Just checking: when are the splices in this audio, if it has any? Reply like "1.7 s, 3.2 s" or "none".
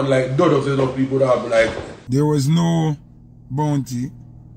1.9 s